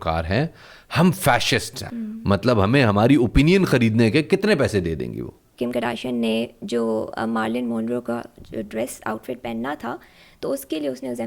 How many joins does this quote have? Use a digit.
2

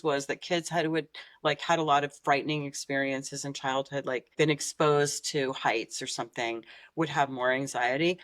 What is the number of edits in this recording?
1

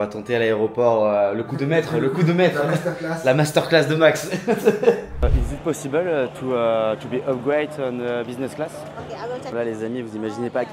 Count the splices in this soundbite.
2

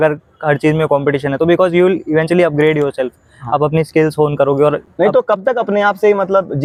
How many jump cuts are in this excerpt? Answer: 0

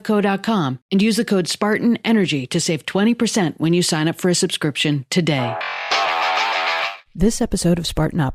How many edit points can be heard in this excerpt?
0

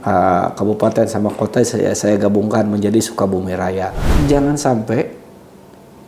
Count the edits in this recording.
1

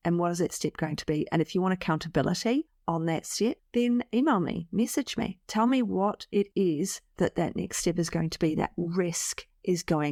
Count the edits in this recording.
0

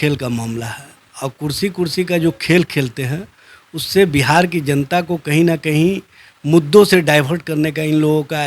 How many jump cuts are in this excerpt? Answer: 0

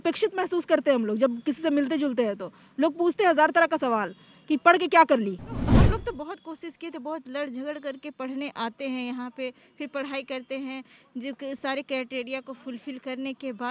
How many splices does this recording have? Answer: 1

